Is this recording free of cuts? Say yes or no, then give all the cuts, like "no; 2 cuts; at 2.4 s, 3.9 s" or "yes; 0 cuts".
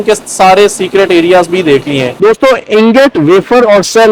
no; 1 cut; at 2.1 s